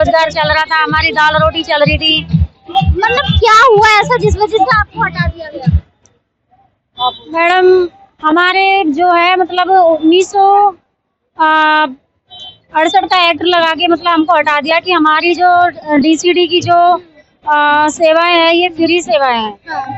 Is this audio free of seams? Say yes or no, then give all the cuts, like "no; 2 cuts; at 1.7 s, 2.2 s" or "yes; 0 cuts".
yes; 0 cuts